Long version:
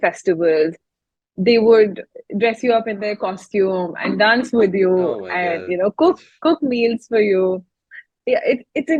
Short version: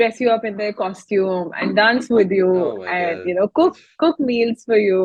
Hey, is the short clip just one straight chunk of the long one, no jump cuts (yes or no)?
yes